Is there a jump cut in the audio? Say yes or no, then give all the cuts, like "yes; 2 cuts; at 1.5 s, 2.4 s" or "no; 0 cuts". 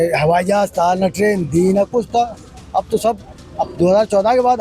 no; 0 cuts